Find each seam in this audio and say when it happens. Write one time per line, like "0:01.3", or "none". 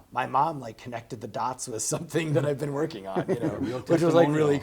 none